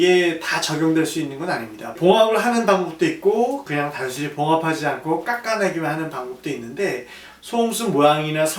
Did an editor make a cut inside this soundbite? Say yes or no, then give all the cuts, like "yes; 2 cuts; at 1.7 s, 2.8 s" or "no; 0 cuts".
no; 0 cuts